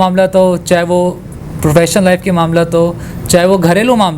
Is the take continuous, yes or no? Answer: yes